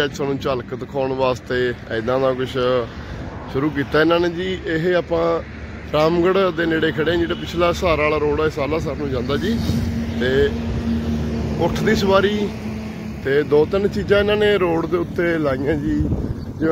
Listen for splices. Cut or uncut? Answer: uncut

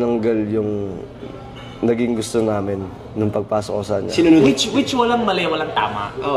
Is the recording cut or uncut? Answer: cut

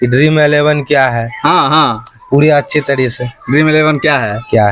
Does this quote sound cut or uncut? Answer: uncut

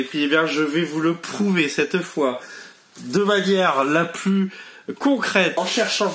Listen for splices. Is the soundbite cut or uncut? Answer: uncut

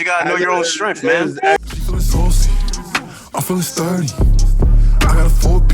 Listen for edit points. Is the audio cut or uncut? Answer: cut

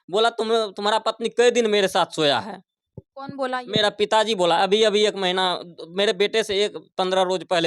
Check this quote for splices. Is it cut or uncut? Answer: uncut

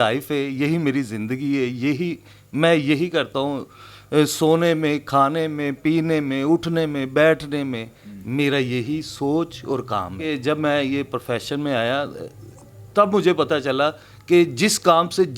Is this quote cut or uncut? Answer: cut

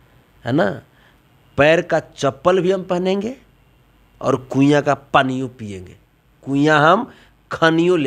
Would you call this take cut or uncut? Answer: uncut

